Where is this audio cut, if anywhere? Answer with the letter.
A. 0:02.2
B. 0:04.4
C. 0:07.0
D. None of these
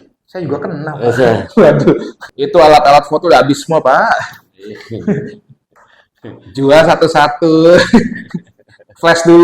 A